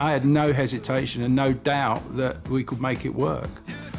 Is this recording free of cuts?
yes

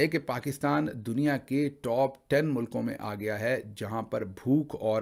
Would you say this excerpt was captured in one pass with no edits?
yes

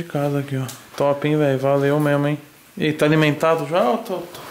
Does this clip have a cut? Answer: no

